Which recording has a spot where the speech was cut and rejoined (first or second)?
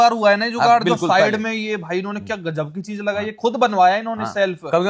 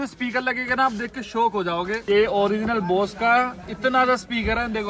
second